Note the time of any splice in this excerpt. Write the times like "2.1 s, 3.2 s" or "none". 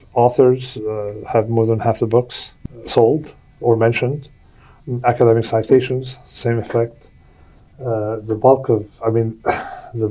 none